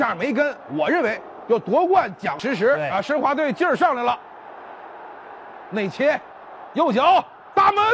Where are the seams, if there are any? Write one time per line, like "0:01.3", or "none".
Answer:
none